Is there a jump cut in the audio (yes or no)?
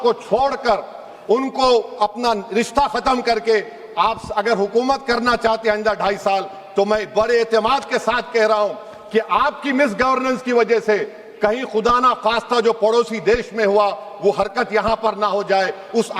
no